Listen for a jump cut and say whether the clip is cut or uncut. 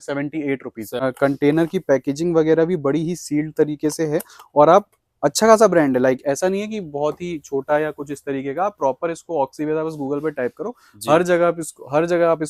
cut